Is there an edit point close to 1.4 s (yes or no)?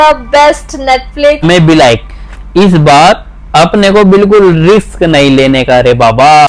yes